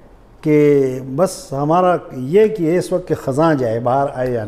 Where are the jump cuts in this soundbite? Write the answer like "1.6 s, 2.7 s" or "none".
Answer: none